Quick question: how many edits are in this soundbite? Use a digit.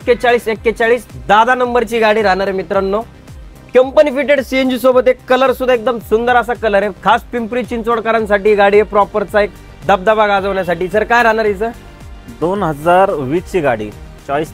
0